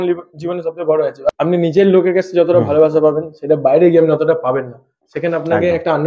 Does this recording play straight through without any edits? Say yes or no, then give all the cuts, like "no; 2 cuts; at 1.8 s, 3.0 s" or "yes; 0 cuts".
no; 1 cut; at 1.3 s